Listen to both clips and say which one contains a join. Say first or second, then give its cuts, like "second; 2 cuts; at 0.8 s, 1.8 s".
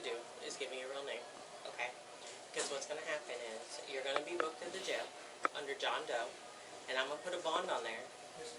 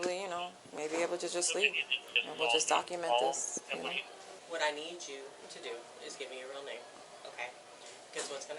second; 1 cut; at 4.4 s